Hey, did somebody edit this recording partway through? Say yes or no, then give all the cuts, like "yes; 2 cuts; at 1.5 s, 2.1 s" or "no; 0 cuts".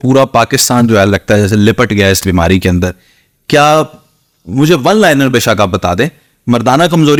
no; 0 cuts